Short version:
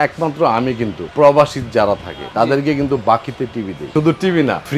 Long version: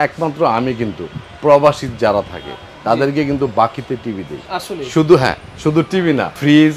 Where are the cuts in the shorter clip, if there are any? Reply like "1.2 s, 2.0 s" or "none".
1.0 s, 2.2 s, 3.8 s